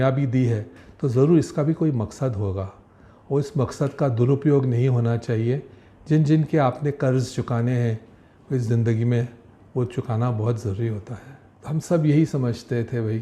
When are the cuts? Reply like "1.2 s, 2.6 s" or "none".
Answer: 11.5 s